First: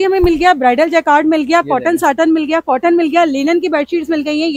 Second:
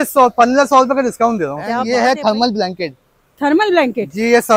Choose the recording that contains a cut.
second; 1 cut; at 1.8 s

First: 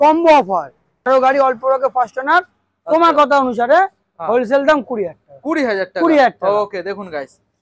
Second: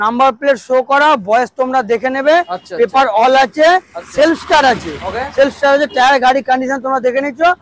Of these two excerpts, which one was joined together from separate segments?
first; 1 cut; at 1.1 s

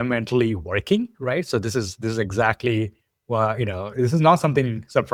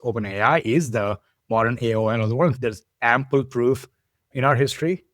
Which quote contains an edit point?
second; 2 cuts; at 2.5 s, 4.2 s

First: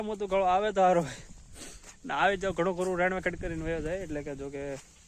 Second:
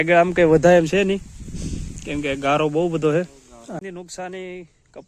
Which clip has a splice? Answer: second; 1 cut; at 3.8 s

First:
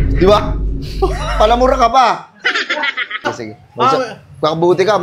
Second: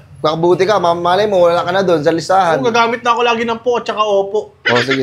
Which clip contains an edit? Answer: first; 1 cut; at 3.2 s

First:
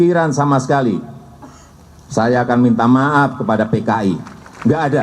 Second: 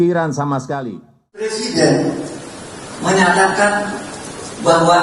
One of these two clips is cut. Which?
second; 1 cut; at 1.5 s

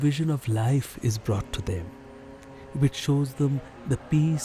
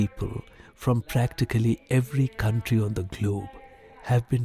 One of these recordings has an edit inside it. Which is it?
second; 1 cut; at 1.3 s

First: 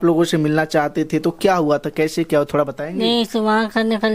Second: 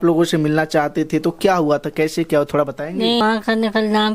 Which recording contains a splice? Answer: second; 1 cut; at 3.2 s

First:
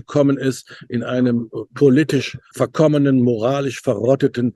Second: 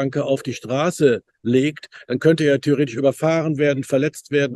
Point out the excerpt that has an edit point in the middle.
first; 1 cut; at 2.5 s

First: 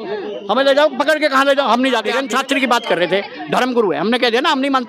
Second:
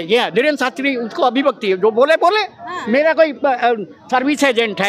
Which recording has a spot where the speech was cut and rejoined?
first; 1 cut; at 2.1 s

